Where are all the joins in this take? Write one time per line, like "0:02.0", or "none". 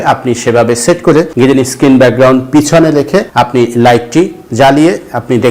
0:01.3
0:03.3